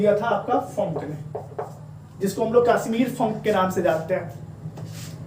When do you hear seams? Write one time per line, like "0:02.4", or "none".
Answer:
none